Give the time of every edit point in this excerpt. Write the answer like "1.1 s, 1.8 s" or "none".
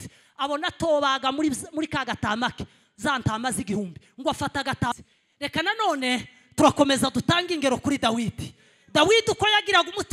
4.9 s